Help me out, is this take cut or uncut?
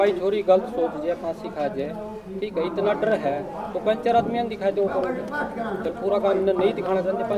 uncut